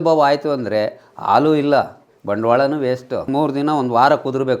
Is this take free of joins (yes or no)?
no